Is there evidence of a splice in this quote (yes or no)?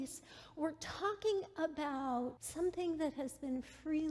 yes